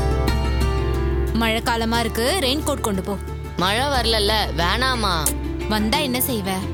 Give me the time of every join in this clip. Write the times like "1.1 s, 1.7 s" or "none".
none